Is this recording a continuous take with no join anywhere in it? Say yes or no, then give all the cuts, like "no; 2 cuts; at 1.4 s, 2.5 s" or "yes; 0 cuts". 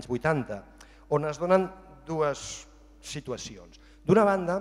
yes; 0 cuts